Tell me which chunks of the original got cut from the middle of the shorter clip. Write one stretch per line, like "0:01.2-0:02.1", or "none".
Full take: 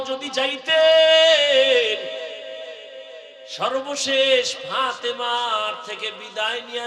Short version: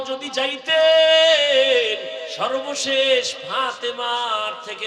0:02.3-0:03.5